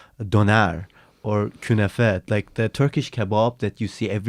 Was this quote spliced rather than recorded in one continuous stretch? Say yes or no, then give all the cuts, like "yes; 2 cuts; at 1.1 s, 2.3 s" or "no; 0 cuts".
no; 0 cuts